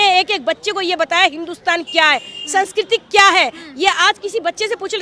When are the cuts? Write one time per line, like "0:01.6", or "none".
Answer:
none